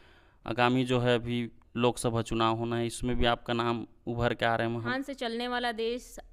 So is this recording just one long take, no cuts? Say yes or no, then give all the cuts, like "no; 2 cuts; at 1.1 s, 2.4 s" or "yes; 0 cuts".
no; 1 cut; at 4.9 s